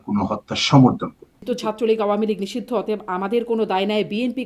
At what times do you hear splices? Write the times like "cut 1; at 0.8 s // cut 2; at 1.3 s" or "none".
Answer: cut 1; at 1.4 s